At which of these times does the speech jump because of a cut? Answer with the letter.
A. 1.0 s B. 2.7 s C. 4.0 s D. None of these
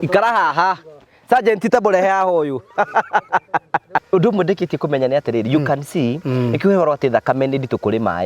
C